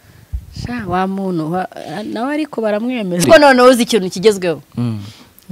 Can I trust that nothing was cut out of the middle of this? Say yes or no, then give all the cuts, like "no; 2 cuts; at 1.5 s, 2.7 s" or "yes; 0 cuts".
no; 1 cut; at 3.3 s